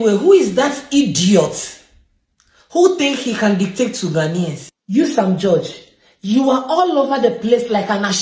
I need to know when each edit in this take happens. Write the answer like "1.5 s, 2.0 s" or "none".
none